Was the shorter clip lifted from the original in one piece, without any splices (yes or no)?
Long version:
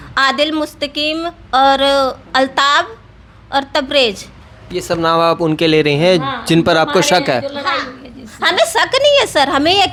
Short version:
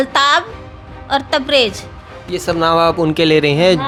yes